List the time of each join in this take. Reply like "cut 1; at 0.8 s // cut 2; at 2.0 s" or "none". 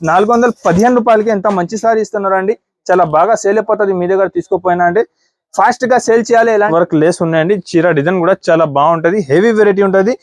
cut 1; at 6.7 s